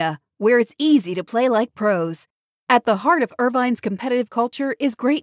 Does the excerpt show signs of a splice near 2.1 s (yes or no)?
no